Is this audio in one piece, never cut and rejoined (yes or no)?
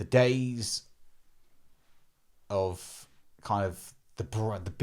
yes